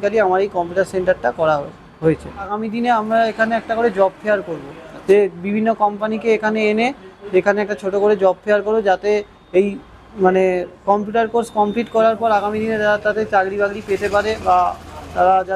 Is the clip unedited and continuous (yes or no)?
no